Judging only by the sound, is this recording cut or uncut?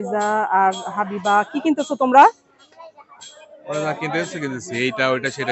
uncut